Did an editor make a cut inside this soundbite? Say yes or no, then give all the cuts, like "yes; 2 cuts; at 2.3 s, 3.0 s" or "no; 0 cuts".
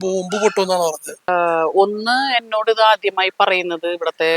yes; 1 cut; at 1.3 s